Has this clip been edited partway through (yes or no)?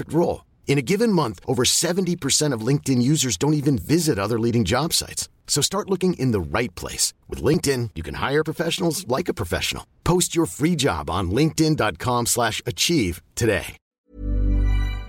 yes